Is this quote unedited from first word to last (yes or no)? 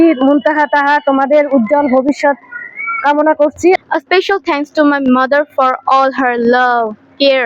no